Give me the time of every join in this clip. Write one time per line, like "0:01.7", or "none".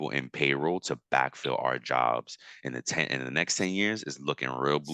none